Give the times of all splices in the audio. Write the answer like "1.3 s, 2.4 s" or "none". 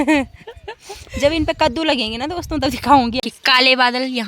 3.2 s